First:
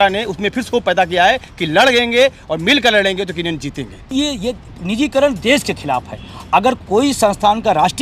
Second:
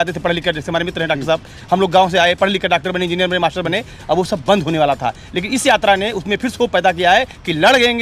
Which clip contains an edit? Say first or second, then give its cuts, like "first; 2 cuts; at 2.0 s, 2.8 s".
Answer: first; 1 cut; at 4.1 s